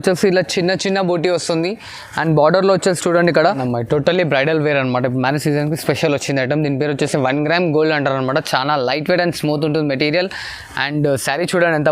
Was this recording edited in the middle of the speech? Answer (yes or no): yes